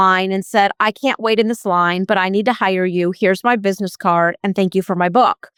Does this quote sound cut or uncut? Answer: uncut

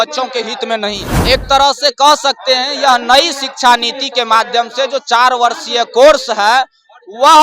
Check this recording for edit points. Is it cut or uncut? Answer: cut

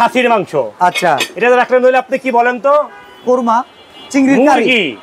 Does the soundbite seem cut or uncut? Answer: uncut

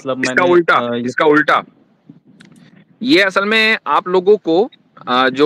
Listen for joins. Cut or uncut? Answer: uncut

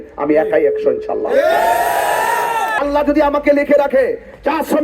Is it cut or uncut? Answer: cut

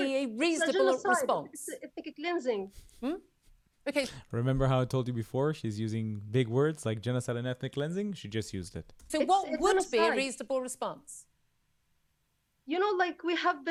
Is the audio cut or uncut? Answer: uncut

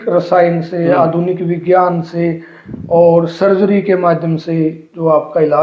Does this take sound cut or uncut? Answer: uncut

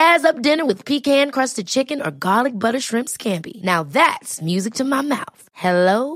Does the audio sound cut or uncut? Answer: uncut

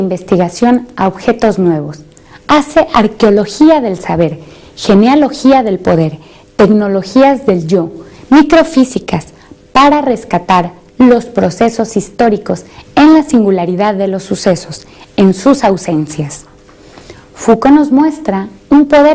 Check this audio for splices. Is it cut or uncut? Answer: cut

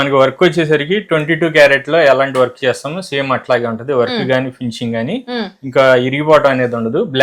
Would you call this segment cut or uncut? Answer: uncut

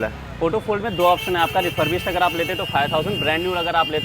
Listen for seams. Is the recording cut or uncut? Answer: uncut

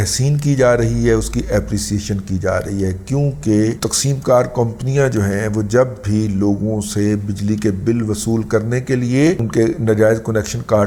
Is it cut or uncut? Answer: uncut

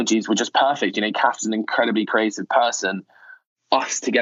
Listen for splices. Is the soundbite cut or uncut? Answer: uncut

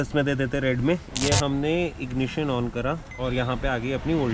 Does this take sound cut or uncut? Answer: cut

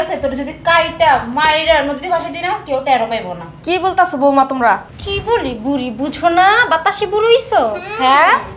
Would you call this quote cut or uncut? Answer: uncut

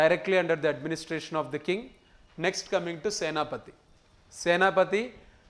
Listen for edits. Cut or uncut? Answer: uncut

